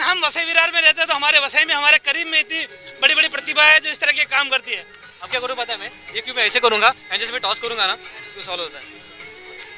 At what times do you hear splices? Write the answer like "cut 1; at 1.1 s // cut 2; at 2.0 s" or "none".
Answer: cut 1; at 5.3 s

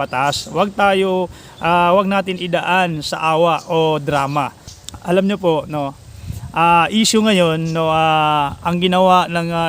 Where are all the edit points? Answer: cut 1; at 4.6 s

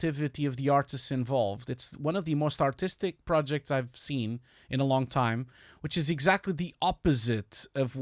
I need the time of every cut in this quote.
none

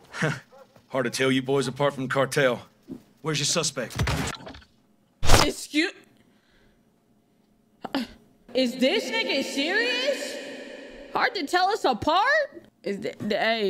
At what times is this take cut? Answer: cut 1; at 8.4 s // cut 2; at 12.7 s

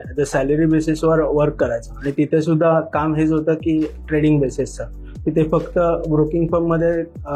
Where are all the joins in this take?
none

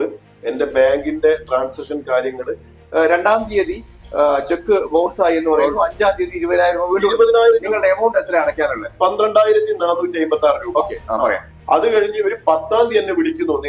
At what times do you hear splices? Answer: cut 1; at 2.8 s // cut 2; at 11.5 s

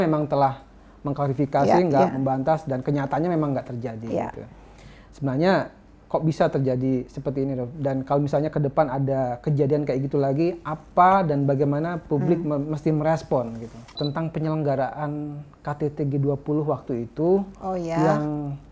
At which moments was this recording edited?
cut 1; at 13.9 s

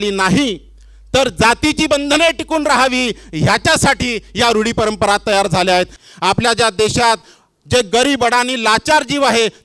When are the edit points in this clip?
cut 1; at 6.0 s

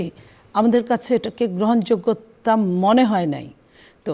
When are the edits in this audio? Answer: none

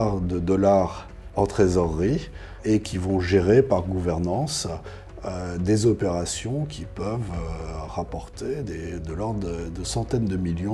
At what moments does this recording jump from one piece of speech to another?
none

